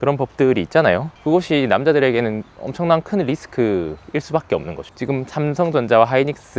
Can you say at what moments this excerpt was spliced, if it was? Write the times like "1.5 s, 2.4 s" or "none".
4.8 s